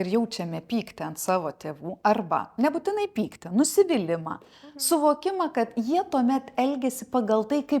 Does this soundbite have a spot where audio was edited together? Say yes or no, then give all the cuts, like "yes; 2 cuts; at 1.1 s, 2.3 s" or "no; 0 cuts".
no; 0 cuts